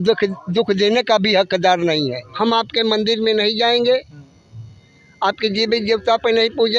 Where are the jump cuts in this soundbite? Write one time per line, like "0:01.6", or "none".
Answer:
0:02.2